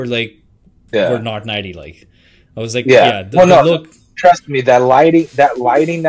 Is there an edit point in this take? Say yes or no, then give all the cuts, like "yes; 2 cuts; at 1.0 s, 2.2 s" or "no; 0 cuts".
no; 0 cuts